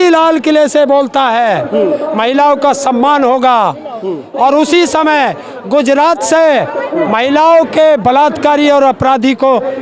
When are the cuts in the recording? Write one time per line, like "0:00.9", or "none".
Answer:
none